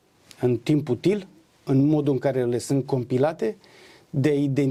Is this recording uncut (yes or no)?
yes